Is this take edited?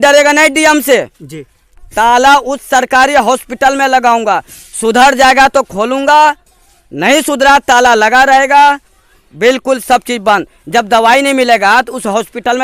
no; 0 cuts

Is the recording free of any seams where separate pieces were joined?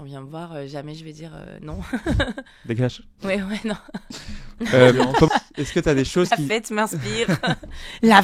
no; 2 cuts; at 2.5 s, 5.3 s

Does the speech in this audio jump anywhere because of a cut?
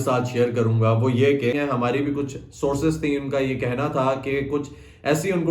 yes; 1 cut; at 1.5 s

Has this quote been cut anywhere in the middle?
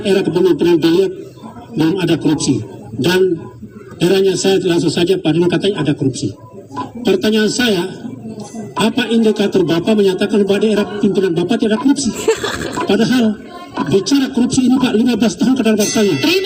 no; 0 cuts

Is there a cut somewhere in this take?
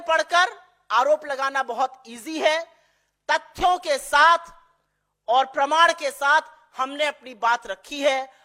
no; 0 cuts

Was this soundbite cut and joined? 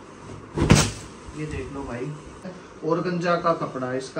yes; 1 cut; at 2.6 s

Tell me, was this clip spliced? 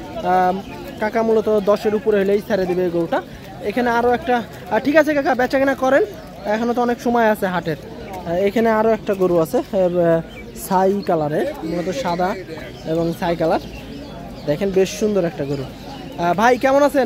no; 0 cuts

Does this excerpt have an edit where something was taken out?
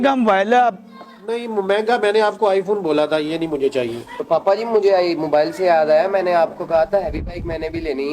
yes; 1 cut; at 4.3 s

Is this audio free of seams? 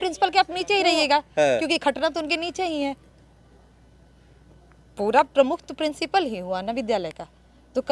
yes; 0 cuts

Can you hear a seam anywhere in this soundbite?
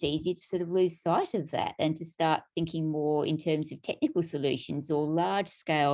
no; 0 cuts

